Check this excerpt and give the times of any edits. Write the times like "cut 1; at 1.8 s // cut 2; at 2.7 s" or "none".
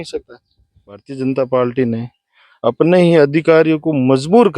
cut 1; at 1.1 s